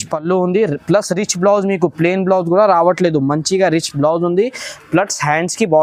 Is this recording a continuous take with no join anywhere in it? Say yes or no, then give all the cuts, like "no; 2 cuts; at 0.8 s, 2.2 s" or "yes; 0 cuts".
yes; 0 cuts